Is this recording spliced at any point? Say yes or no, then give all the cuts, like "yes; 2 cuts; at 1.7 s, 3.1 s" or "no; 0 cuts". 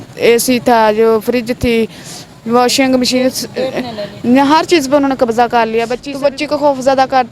yes; 1 cut; at 6.0 s